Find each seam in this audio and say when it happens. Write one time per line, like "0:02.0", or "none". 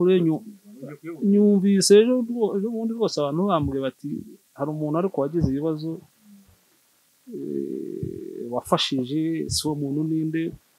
none